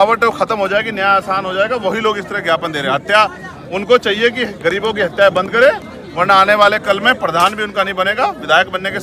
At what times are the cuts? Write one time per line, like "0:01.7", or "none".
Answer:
none